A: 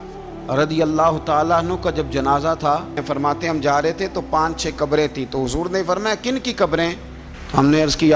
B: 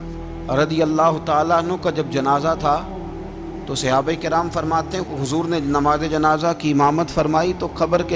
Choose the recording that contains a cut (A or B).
A